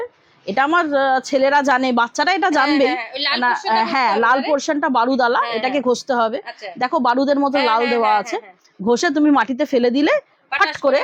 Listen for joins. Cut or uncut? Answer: uncut